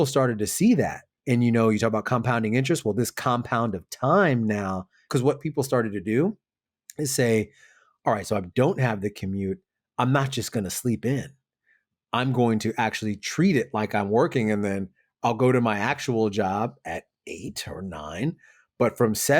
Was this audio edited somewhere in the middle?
yes; 1 cut; at 5.0 s

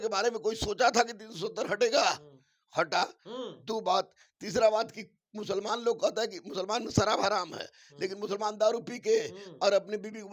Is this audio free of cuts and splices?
yes; 0 cuts

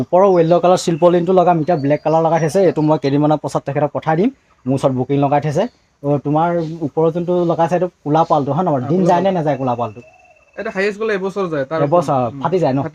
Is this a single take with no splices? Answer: yes; 0 cuts

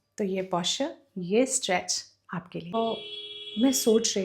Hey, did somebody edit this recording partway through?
yes; 1 cut; at 2.7 s

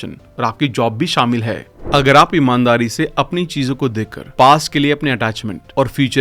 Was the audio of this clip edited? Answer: yes; 1 cut; at 1.7 s

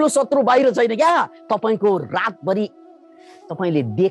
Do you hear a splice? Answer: no; 0 cuts

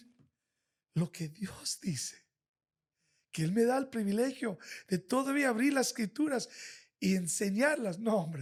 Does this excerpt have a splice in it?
no; 0 cuts

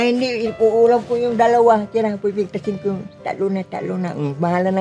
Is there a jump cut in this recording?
no; 0 cuts

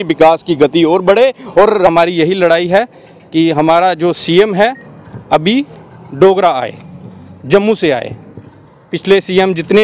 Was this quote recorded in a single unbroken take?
no; 1 cut; at 1.9 s

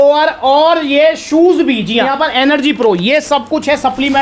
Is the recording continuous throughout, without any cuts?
no; 1 cut; at 2.1 s

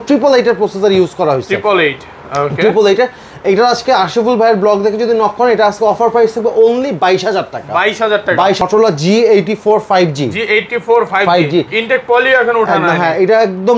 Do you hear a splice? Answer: yes; 1 cut; at 8.6 s

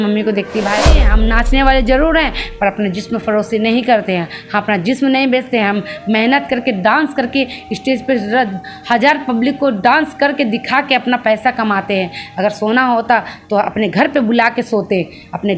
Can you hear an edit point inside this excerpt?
yes; 1 cut; at 1.1 s

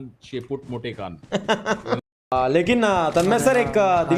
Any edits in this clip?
yes; 1 cut; at 2.3 s

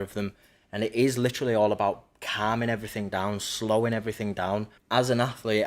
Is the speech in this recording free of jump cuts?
no; 1 cut; at 4.8 s

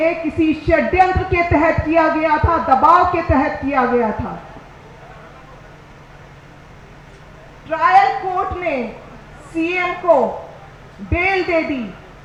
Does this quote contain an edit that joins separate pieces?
no; 0 cuts

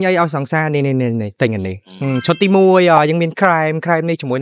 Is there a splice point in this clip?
no; 0 cuts

